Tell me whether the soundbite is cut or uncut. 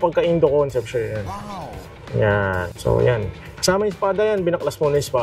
cut